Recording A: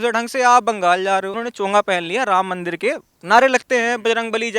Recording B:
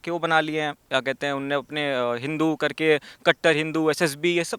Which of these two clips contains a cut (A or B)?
A